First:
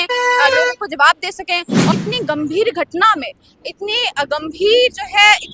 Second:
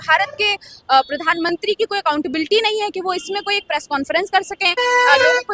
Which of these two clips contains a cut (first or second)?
first